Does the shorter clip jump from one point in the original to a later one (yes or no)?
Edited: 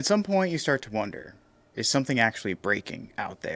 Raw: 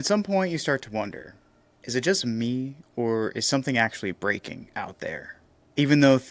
yes